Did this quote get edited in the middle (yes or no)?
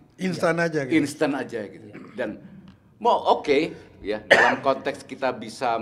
no